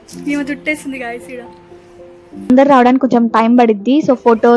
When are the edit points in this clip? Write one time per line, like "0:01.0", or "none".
0:02.5